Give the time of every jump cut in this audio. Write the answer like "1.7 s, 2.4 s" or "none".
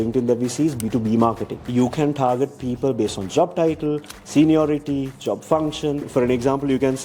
1.5 s, 6.1 s